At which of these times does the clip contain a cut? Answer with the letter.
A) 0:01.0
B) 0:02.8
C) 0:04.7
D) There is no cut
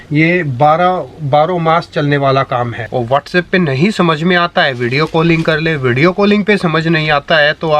B